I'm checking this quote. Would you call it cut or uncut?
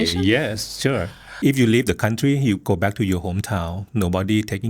cut